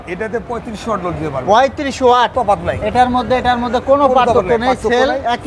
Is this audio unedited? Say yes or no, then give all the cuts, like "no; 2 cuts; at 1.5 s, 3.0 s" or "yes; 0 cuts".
no; 1 cut; at 2.3 s